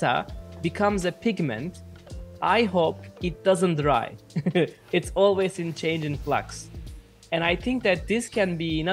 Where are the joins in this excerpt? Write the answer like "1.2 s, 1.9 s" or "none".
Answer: none